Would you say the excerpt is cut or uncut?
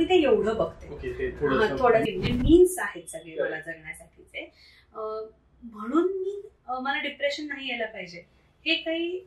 cut